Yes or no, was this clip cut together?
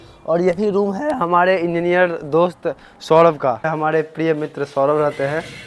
yes